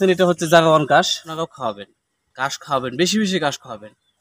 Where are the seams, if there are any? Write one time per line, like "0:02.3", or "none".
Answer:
0:01.4